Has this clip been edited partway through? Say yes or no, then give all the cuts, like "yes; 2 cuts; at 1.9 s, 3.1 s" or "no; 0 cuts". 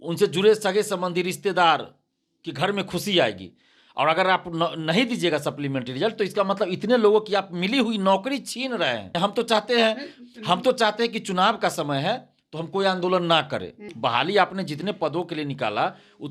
yes; 2 cuts; at 9.1 s, 13.8 s